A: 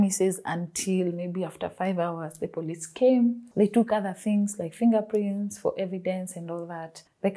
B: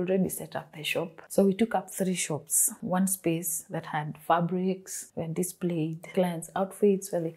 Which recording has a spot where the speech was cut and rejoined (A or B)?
B